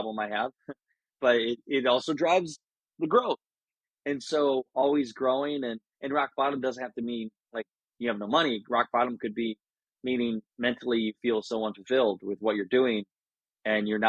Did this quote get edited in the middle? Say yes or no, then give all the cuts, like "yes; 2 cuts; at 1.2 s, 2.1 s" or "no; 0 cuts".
no; 0 cuts